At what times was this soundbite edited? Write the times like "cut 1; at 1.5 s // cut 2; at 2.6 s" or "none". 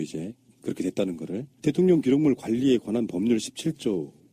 none